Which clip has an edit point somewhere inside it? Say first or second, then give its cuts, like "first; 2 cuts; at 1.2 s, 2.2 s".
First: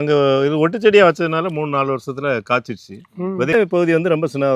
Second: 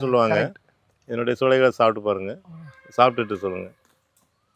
first; 1 cut; at 3.5 s